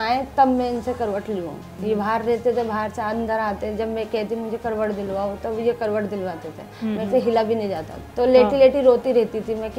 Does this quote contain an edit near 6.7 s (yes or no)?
no